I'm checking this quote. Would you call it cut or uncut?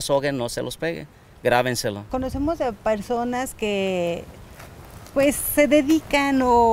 uncut